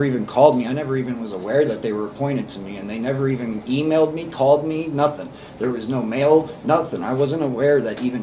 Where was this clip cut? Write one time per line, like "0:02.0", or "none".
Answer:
none